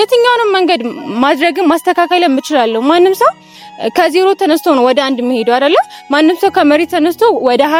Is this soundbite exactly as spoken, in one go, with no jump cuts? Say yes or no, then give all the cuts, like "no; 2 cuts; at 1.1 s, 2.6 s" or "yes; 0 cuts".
yes; 0 cuts